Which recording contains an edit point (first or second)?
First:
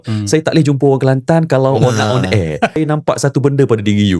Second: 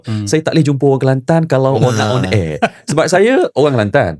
first